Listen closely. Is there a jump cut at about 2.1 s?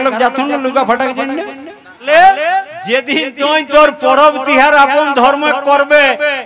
yes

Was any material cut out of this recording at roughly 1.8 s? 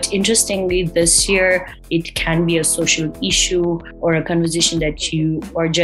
yes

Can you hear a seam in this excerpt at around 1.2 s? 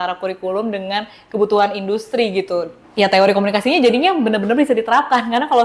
no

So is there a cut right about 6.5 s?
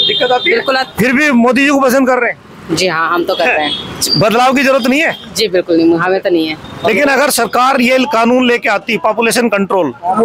yes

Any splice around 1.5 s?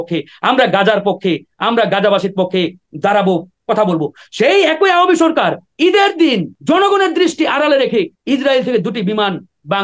no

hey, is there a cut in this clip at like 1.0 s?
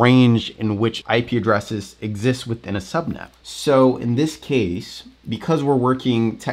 yes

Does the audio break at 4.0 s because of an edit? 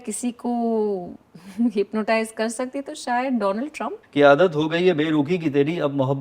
yes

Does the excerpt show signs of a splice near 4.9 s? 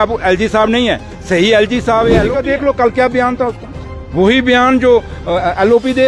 no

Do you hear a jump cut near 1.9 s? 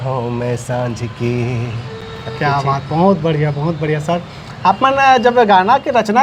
no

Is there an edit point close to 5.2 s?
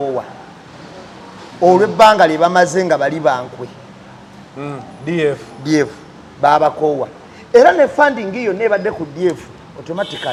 no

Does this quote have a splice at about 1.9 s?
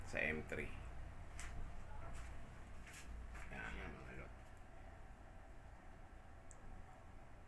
no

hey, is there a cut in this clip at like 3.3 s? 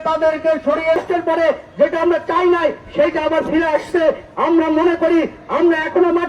no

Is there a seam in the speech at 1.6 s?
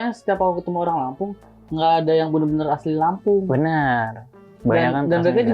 no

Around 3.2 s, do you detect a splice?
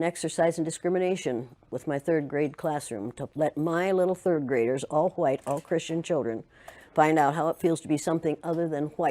yes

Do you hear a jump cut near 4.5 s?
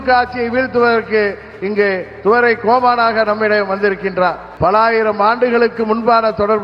yes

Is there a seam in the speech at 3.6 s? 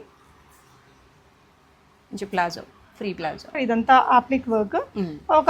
yes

